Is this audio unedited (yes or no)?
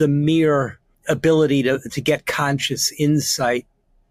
no